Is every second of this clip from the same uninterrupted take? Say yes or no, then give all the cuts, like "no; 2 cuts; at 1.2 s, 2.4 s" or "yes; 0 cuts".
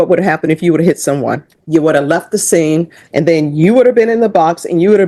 no; 2 cuts; at 1.5 s, 3.0 s